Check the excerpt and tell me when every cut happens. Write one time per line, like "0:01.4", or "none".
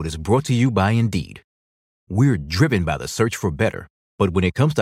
none